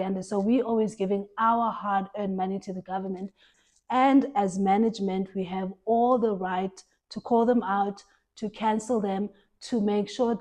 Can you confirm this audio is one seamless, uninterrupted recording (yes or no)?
no